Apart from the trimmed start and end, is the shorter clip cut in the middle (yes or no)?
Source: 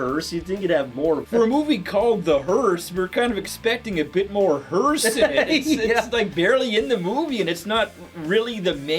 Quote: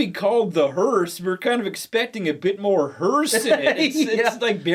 no